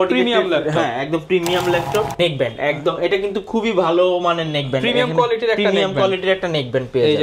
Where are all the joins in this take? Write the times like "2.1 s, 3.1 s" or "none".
2.1 s